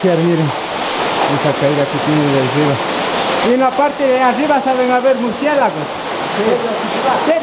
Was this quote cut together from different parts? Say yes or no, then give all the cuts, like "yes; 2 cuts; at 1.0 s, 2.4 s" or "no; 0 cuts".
no; 0 cuts